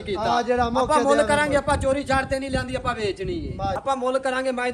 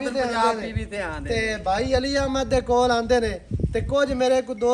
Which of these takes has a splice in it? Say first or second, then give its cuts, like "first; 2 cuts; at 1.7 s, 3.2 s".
first; 1 cut; at 3.8 s